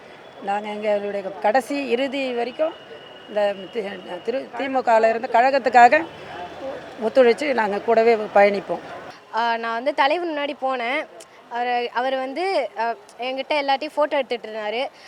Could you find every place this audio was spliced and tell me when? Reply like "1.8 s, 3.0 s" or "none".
none